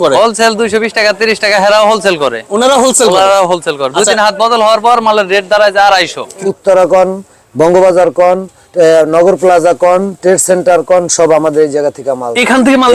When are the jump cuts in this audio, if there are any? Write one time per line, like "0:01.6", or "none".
0:06.5